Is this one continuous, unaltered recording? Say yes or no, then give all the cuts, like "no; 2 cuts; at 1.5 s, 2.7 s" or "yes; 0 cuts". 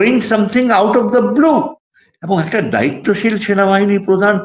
yes; 0 cuts